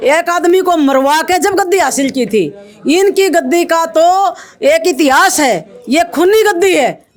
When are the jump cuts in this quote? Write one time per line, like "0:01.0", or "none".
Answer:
none